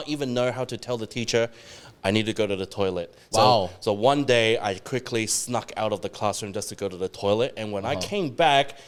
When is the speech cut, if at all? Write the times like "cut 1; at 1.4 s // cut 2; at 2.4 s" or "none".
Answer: none